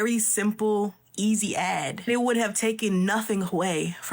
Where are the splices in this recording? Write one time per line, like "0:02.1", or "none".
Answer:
0:01.9